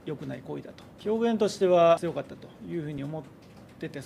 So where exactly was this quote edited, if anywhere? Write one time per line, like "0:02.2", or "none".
0:00.9
0:02.0